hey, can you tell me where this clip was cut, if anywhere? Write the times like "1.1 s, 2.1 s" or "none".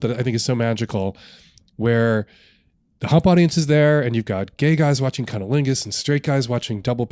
none

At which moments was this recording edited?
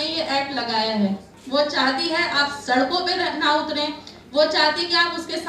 1.3 s

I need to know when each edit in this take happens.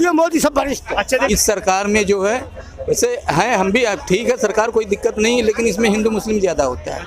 1.3 s

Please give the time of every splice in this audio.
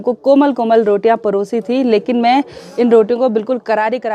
none

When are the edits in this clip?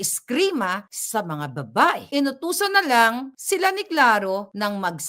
0.9 s, 2.0 s

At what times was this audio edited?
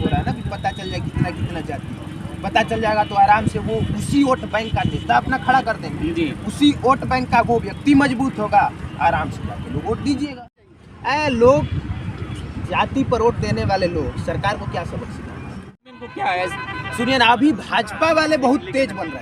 10.5 s, 15.9 s

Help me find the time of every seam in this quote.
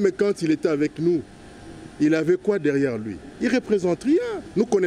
none

